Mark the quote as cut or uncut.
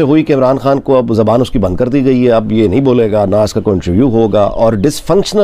uncut